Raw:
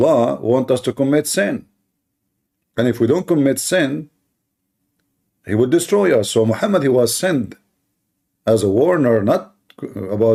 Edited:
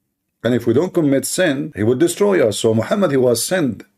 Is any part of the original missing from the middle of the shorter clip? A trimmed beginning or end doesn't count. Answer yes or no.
yes